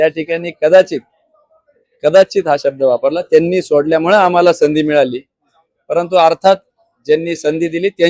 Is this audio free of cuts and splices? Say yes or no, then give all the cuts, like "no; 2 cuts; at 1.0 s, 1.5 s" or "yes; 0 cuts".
yes; 0 cuts